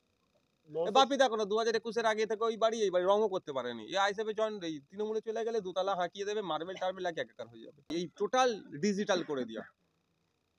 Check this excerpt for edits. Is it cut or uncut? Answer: cut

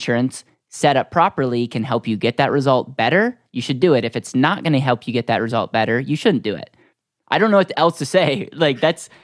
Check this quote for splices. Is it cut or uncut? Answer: uncut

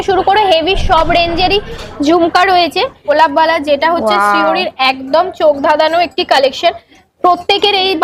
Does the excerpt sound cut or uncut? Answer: cut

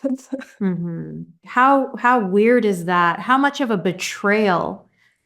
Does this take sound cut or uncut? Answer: cut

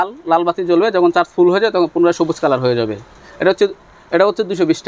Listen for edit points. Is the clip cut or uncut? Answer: uncut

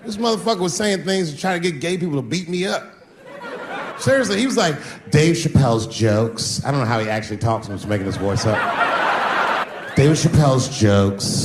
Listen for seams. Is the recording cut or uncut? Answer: cut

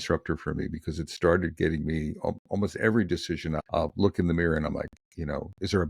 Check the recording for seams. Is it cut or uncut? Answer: cut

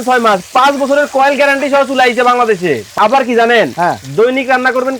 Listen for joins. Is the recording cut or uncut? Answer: cut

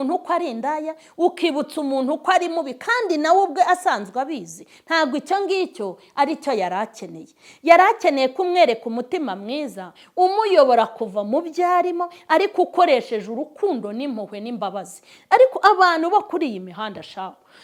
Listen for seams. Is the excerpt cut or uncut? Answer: uncut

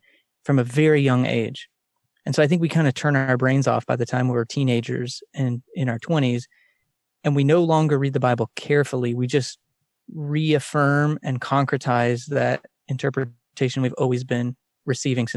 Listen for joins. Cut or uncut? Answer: uncut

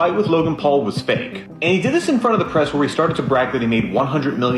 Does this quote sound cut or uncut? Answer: uncut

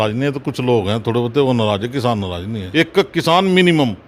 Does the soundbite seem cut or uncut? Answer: cut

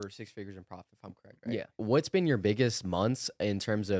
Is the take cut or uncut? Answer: cut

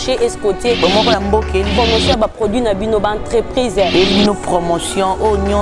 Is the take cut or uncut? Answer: uncut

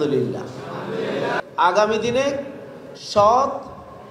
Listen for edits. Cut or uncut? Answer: cut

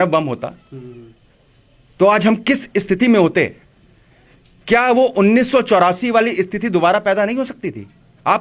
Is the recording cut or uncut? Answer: uncut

